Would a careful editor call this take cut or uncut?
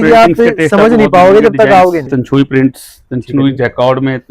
cut